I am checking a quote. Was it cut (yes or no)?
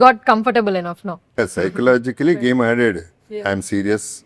no